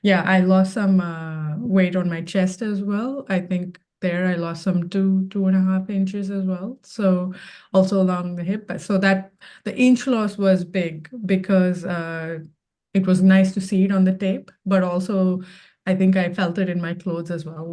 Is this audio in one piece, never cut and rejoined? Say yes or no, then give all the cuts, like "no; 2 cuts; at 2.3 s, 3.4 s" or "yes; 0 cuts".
yes; 0 cuts